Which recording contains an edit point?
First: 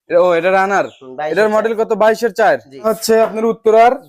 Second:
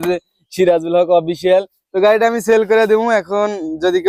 first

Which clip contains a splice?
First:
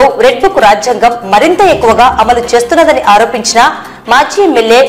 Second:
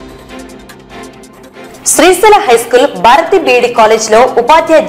second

